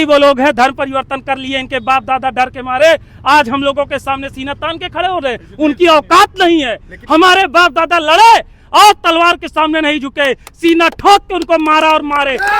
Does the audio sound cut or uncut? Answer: uncut